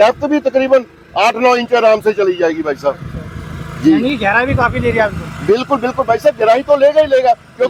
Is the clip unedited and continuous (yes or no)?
yes